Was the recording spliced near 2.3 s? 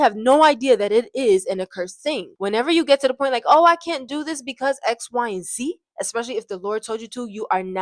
yes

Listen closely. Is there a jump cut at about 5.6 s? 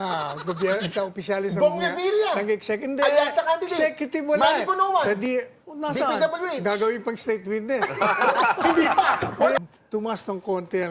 no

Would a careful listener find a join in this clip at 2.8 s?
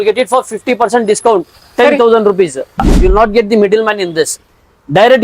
yes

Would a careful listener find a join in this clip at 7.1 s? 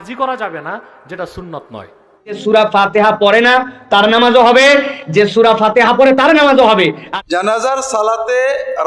yes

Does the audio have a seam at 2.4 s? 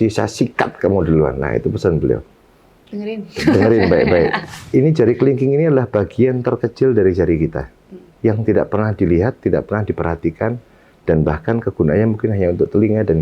no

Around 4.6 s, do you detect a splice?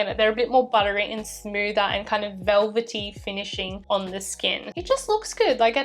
yes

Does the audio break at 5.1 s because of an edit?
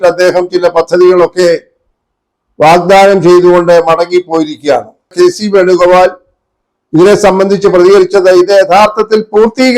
yes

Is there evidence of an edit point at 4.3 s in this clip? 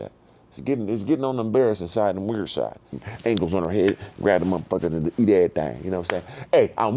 no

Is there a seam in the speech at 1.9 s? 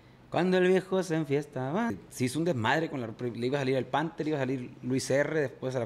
yes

